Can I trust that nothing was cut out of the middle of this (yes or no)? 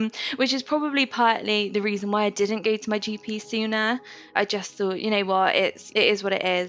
no